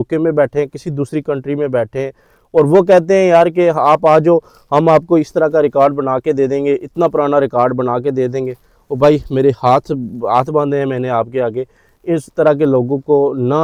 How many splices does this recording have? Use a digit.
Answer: 0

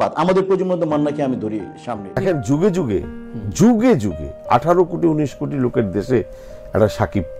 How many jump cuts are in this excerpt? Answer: 1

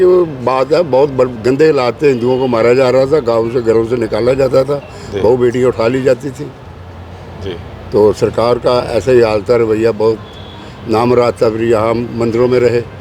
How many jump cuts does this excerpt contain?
0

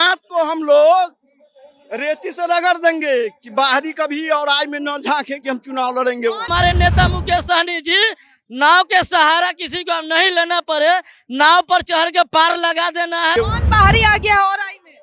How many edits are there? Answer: 2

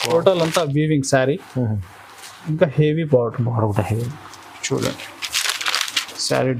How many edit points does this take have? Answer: 0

